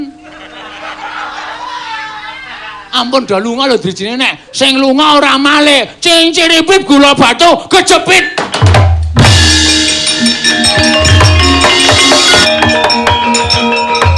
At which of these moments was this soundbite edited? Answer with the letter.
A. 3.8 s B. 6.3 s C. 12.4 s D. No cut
C